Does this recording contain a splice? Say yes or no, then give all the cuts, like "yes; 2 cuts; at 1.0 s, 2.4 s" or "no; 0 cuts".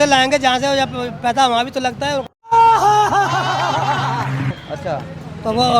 no; 0 cuts